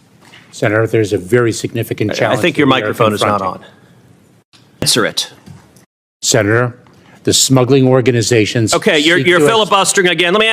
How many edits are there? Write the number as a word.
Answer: one